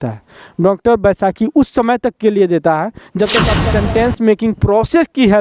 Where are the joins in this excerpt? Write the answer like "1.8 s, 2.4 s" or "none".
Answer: 3.5 s

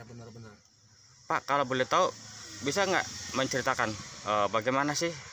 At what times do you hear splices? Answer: none

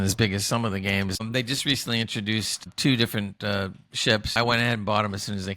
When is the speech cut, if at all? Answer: 1.2 s, 2.6 s, 4.3 s

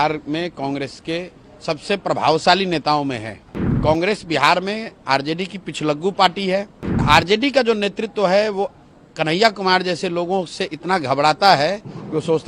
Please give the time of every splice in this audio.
3.7 s, 7.0 s

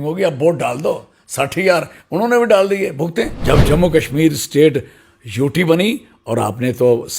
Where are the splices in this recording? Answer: 3.4 s

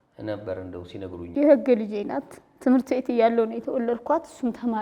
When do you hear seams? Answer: 1.2 s

